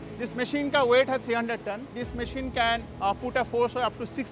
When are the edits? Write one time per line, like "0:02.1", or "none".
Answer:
none